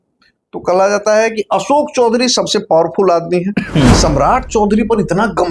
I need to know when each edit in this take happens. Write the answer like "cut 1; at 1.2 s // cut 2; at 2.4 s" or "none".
cut 1; at 4.0 s